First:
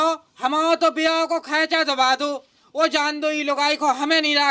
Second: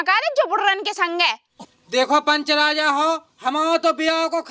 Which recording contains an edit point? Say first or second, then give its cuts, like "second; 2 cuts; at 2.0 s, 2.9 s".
second; 1 cut; at 1.6 s